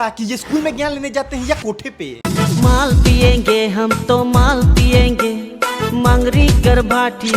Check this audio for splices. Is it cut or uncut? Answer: uncut